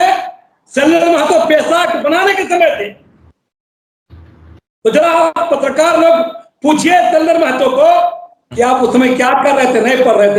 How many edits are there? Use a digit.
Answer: 0